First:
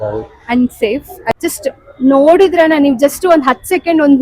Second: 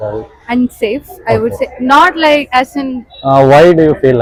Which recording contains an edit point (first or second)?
first